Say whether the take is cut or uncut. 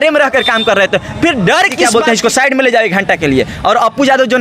cut